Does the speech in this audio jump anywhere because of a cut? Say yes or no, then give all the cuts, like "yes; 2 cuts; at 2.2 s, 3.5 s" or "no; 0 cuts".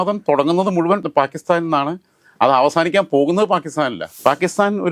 yes; 2 cuts; at 1.0 s, 4.1 s